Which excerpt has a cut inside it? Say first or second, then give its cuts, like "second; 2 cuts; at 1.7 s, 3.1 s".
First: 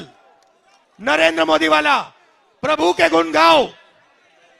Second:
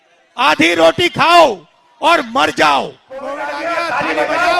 second; 1 cut; at 3.3 s